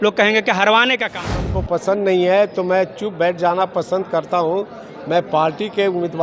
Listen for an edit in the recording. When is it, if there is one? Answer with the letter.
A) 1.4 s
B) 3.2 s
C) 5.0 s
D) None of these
A